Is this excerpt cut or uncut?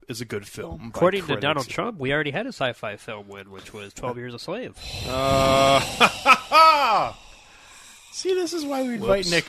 uncut